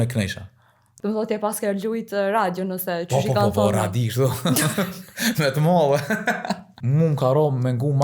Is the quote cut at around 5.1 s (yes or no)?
no